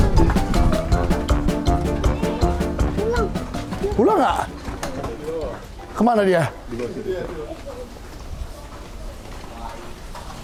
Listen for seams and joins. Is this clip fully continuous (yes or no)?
yes